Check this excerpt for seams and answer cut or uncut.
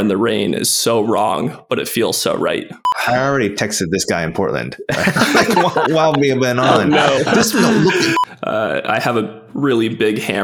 cut